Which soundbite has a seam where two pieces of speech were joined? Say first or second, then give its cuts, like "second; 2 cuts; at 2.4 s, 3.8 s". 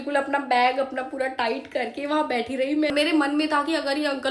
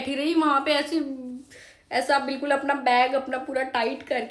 first; 1 cut; at 2.9 s